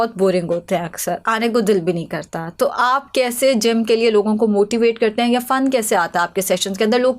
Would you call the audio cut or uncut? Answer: uncut